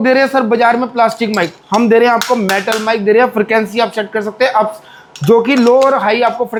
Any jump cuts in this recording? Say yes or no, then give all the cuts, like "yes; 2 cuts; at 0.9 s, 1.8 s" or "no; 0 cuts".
no; 0 cuts